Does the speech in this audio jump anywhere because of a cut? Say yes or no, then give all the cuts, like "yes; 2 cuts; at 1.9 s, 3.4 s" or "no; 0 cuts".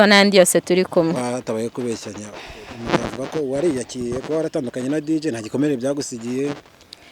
yes; 1 cut; at 1.2 s